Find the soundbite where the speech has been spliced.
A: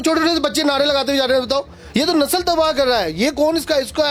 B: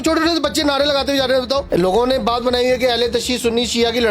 B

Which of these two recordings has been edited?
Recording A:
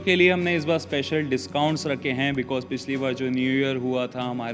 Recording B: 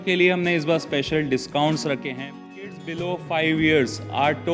B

